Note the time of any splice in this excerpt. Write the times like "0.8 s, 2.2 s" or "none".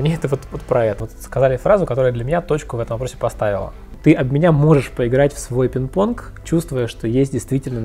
1.0 s, 3.9 s